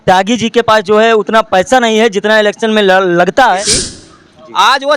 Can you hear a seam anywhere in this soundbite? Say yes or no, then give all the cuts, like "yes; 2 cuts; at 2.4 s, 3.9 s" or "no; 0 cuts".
yes; 1 cut; at 3.8 s